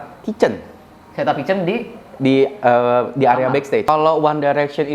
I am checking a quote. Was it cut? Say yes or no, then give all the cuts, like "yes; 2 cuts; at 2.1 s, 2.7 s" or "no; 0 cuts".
yes; 1 cut; at 3.9 s